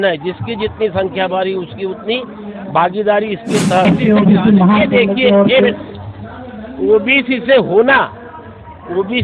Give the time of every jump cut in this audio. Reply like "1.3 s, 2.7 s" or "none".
3.8 s